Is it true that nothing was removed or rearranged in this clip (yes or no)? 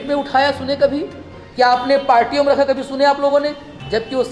yes